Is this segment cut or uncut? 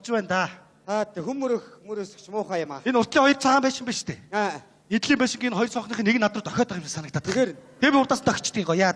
cut